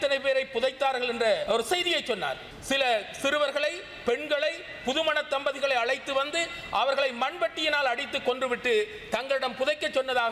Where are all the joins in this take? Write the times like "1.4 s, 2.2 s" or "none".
1.4 s, 2.5 s